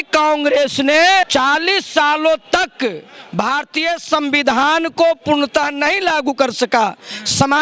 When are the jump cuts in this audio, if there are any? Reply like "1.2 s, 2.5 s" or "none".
1.3 s